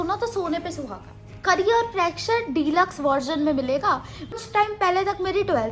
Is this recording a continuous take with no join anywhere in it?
no; 1 cut; at 4.4 s

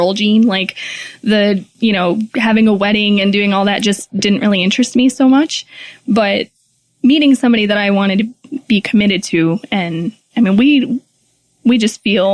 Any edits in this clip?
no; 0 cuts

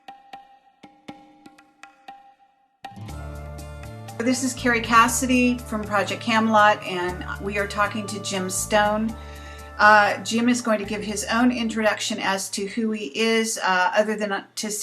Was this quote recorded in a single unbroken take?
no; 1 cut; at 1.0 s

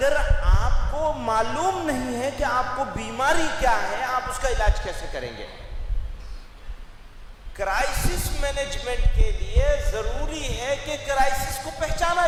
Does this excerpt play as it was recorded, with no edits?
yes; 0 cuts

